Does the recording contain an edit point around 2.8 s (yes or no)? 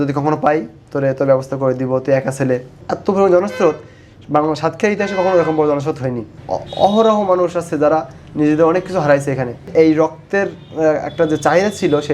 yes